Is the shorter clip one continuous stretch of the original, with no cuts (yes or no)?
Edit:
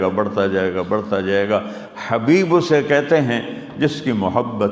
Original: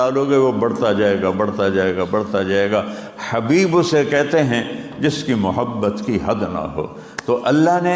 yes